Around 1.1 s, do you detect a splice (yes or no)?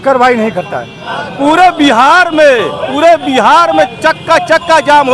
yes